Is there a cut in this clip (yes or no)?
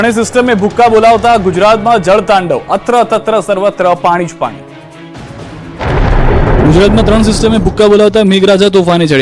no